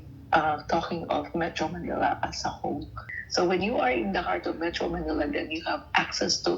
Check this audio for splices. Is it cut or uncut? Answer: cut